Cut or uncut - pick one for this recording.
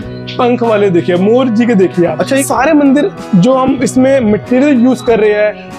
cut